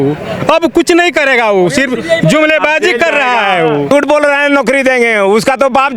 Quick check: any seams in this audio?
yes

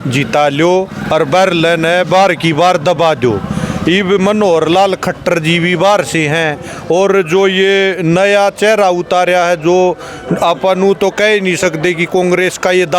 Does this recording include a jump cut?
no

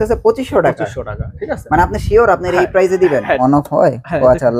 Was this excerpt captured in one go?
no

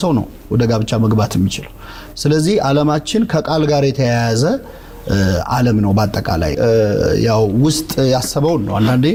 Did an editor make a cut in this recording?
no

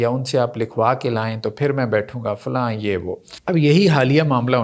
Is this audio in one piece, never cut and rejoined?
no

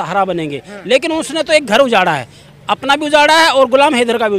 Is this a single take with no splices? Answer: yes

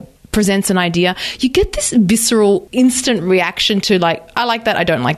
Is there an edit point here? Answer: yes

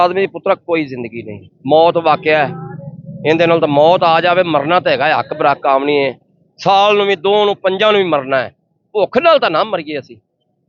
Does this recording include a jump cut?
no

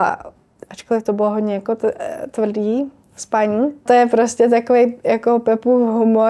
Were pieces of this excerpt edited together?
yes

